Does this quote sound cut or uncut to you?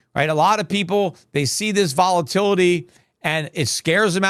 uncut